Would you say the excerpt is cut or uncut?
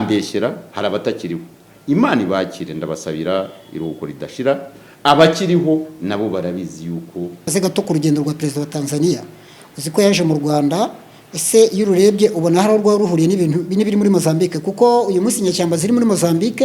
cut